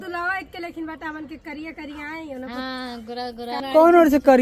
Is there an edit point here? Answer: no; 0 cuts

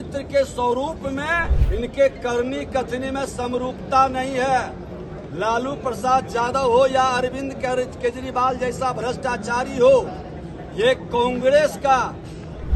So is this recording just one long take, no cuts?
no; 1 cut; at 1.6 s

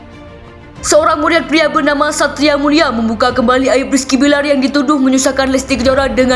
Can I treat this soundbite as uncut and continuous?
yes; 0 cuts

